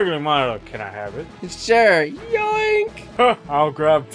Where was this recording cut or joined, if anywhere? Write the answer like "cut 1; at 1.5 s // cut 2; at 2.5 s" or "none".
cut 1; at 1.5 s // cut 2; at 3.0 s